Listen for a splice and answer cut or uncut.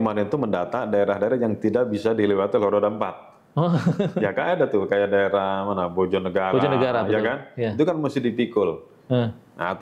uncut